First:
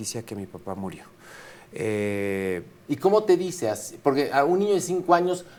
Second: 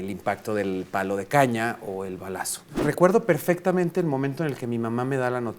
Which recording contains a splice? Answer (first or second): second